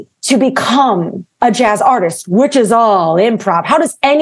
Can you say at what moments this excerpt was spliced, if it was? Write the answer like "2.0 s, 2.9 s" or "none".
none